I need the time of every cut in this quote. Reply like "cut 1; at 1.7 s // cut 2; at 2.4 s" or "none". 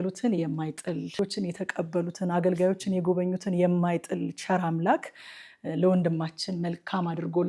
cut 1; at 1.1 s